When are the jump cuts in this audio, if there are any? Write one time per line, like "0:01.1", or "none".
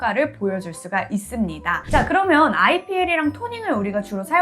0:01.9